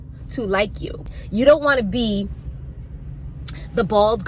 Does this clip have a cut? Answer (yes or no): yes